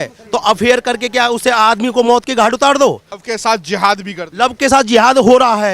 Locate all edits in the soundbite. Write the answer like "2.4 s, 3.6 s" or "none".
3.1 s